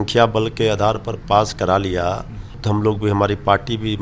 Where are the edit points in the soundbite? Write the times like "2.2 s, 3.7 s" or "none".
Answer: 2.6 s